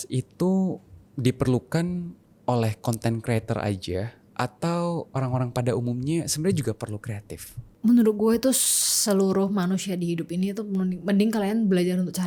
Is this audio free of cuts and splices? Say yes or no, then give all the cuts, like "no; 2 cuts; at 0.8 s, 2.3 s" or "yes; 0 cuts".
yes; 0 cuts